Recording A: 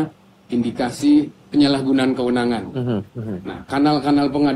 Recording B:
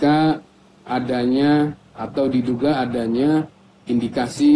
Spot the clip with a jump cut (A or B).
A